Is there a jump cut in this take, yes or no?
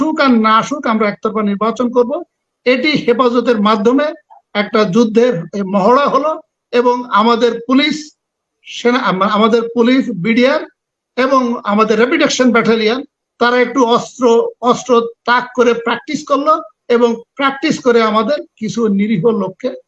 no